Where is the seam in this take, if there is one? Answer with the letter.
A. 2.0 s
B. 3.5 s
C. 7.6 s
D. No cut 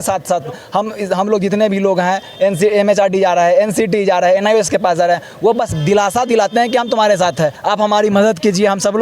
C